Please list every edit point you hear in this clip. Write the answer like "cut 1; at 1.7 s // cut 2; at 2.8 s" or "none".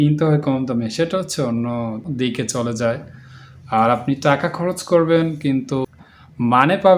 cut 1; at 2.1 s // cut 2; at 5.9 s